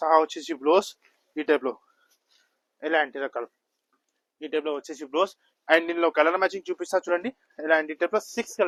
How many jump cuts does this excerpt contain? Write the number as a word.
zero